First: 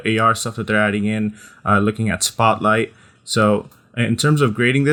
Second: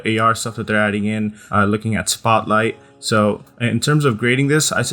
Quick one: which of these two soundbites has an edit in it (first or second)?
second